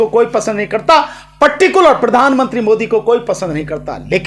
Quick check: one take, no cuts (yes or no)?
yes